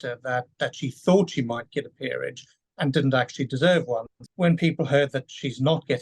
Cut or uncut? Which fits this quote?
cut